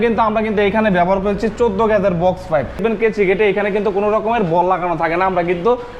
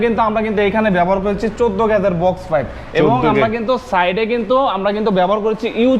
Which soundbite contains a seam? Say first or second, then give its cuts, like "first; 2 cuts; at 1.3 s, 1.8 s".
first; 1 cut; at 2.8 s